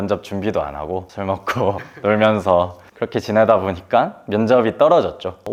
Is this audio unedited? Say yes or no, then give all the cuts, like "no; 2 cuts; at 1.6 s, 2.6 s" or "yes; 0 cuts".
yes; 0 cuts